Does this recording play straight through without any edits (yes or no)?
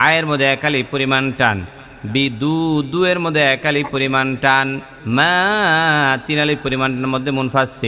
no